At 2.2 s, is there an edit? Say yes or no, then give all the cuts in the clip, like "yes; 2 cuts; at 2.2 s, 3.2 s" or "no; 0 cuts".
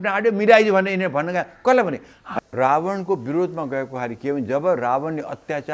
yes; 1 cut; at 2.2 s